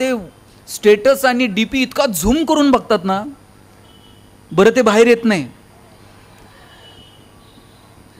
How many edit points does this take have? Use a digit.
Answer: 0